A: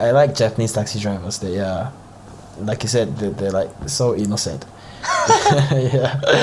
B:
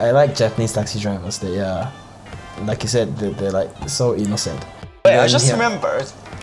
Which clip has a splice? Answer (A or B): B